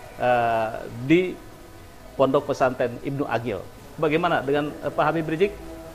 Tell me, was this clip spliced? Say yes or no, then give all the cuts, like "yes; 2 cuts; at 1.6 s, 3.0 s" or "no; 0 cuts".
yes; 1 cut; at 3.7 s